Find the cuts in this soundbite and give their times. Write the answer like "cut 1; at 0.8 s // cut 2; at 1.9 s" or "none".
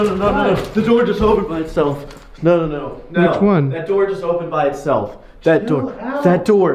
none